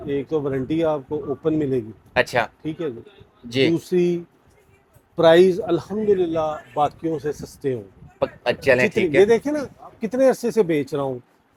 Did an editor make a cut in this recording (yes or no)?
no